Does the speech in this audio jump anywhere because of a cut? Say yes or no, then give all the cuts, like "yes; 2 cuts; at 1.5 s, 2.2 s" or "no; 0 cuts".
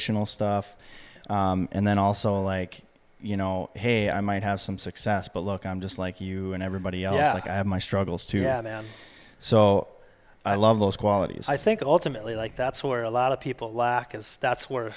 no; 0 cuts